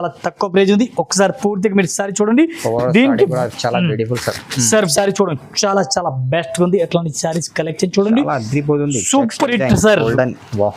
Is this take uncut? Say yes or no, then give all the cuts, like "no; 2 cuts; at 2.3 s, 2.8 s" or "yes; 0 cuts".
no; 1 cut; at 4.9 s